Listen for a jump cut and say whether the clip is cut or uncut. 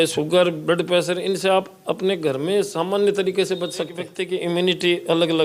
cut